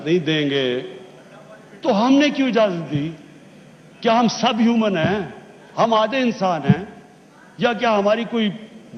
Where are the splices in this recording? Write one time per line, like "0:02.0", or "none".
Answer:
none